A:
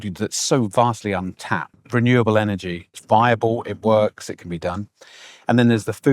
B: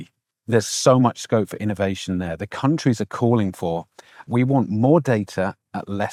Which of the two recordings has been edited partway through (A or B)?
A